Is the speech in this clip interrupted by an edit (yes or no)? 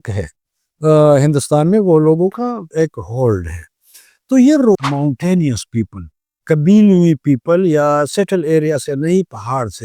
yes